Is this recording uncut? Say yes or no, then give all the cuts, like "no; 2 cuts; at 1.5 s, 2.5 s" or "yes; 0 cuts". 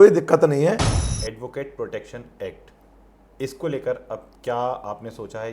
no; 1 cut; at 0.9 s